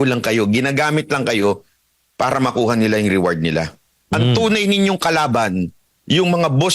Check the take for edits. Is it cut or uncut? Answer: cut